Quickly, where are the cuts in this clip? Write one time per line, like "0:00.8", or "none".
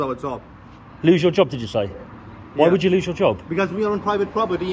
none